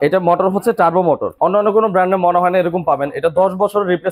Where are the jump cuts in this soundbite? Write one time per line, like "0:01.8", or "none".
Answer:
0:01.3